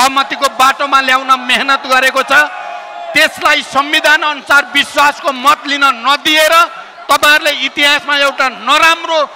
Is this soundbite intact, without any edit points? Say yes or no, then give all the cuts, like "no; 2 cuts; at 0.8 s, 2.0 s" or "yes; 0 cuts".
yes; 0 cuts